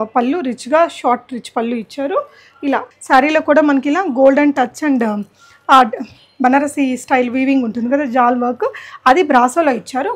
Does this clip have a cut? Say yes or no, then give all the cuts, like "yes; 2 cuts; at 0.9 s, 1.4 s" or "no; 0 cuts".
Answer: yes; 1 cut; at 2.9 s